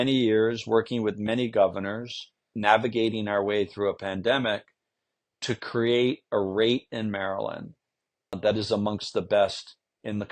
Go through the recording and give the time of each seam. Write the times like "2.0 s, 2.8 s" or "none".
2.5 s, 8.4 s